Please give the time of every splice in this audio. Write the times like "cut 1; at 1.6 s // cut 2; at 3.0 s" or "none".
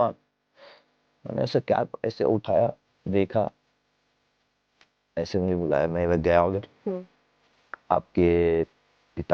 none